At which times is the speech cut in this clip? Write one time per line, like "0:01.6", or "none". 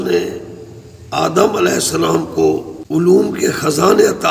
0:02.7